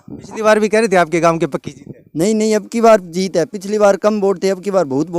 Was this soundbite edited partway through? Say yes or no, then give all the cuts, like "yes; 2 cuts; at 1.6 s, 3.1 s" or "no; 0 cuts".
no; 0 cuts